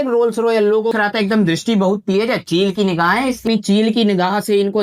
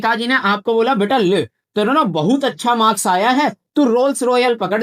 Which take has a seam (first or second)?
first